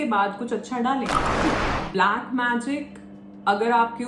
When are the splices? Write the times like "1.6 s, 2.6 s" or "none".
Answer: 1.4 s